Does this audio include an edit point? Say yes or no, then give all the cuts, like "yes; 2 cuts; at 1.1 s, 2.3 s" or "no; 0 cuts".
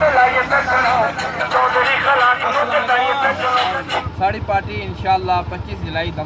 yes; 1 cut; at 4.1 s